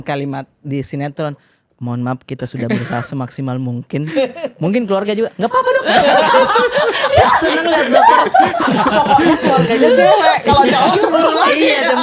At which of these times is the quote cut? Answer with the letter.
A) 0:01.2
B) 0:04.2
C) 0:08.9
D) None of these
D